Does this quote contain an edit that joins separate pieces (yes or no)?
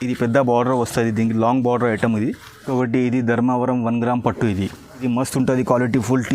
yes